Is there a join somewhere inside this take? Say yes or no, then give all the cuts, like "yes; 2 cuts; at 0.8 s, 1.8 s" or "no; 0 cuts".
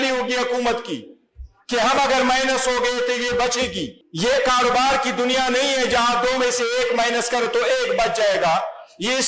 yes; 1 cut; at 4.0 s